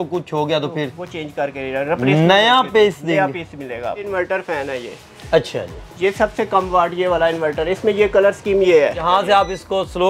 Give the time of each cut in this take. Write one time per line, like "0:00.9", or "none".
0:04.1
0:09.1

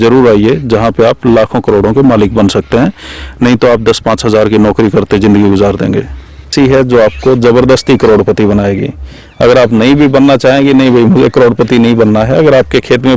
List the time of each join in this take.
0:06.5

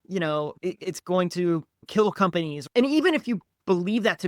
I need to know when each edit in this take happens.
0:02.6

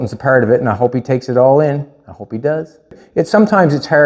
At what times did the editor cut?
0:03.0

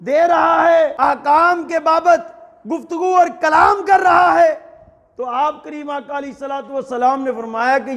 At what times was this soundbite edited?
0:00.9

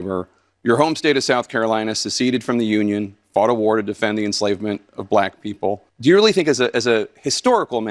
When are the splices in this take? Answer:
0:05.9

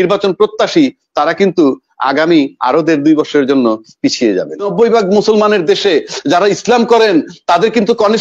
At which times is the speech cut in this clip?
0:04.7

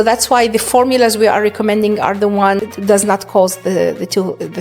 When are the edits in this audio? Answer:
0:02.6

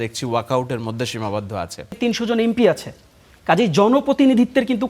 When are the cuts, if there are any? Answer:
0:02.0

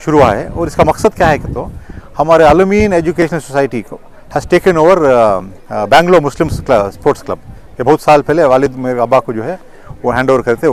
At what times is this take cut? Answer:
none

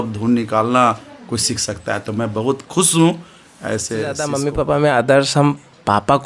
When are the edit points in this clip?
0:04.2

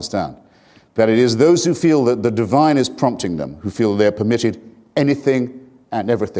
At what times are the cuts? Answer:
0:01.1

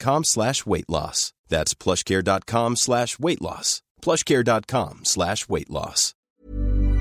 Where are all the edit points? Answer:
0:06.1

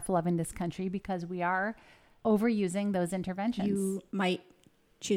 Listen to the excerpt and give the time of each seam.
0:02.1
0:03.6

